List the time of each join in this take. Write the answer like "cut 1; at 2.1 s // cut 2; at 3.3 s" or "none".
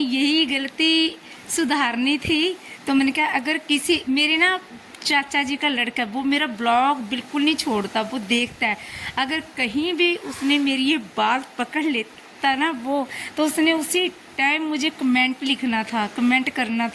none